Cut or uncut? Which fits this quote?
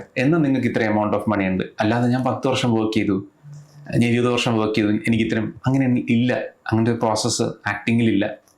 uncut